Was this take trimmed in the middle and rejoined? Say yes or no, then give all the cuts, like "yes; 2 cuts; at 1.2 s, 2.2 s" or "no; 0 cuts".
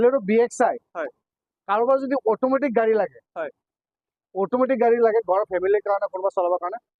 no; 0 cuts